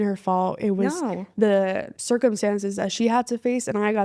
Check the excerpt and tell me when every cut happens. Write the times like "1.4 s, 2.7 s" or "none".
1.9 s